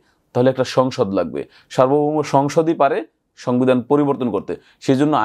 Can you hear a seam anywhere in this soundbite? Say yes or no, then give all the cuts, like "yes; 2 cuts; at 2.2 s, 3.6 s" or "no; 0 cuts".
no; 0 cuts